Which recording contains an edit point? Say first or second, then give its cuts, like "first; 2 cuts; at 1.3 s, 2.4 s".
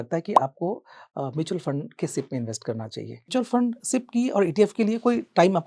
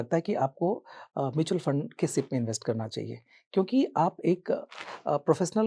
first; 1 cut; at 3.3 s